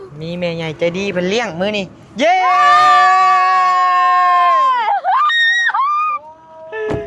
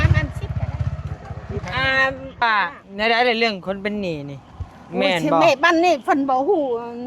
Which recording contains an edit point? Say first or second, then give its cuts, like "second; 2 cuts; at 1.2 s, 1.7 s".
second; 1 cut; at 2.4 s